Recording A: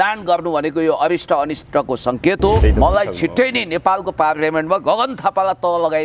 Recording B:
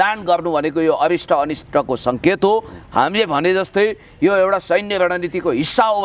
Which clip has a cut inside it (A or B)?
A